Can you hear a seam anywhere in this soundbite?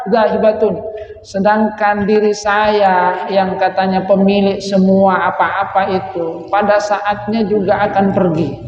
no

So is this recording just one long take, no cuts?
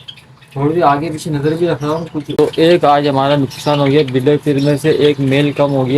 no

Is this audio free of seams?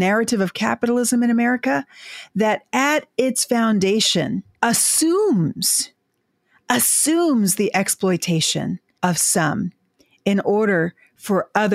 no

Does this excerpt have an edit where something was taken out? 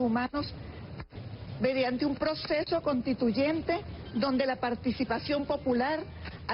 yes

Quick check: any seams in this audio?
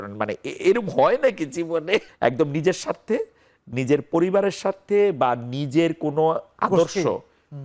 yes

